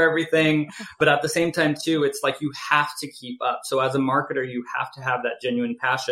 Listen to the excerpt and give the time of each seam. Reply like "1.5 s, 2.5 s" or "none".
0.9 s